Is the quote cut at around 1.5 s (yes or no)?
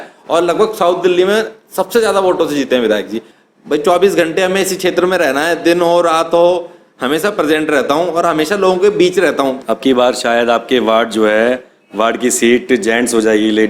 no